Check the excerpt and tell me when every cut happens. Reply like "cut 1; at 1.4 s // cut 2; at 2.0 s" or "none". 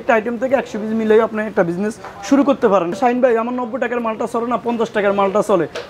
cut 1; at 3.0 s